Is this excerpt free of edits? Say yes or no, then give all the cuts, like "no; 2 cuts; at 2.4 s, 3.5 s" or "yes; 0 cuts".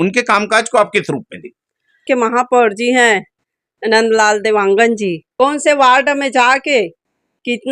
no; 2 cuts; at 2.0 s, 5.2 s